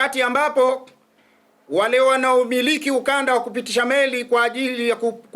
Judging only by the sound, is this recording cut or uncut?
uncut